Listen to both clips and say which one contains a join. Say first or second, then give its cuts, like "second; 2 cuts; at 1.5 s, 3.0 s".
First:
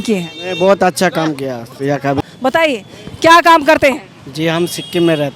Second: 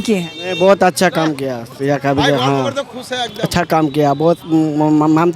first; 1 cut; at 2.2 s